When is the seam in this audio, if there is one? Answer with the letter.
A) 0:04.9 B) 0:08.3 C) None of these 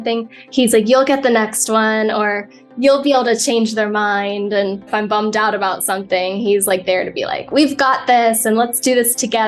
A